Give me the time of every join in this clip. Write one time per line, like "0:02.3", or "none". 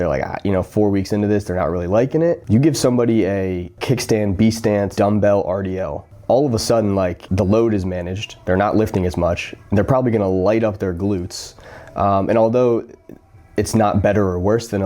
0:02.4
0:03.8
0:04.9
0:07.2